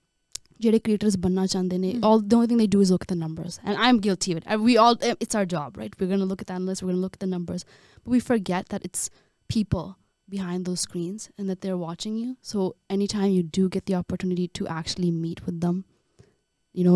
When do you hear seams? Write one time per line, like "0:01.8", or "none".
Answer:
none